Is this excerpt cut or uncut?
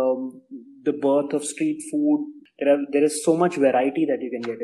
cut